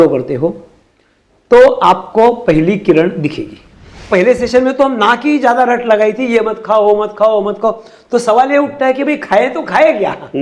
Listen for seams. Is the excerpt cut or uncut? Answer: cut